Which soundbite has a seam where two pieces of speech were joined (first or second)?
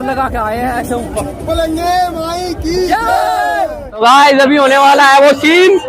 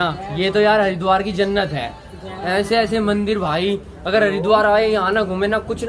first